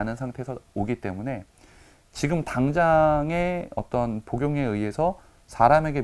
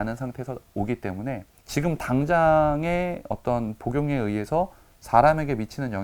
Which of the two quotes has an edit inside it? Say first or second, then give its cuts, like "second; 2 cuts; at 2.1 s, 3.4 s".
second; 1 cut; at 1.5 s